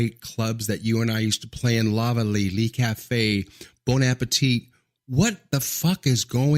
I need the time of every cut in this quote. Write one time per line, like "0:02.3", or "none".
none